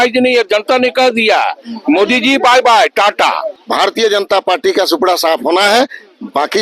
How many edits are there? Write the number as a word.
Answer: one